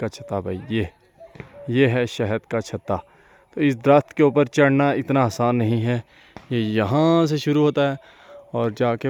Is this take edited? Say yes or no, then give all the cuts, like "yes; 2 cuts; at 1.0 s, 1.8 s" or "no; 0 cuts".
no; 0 cuts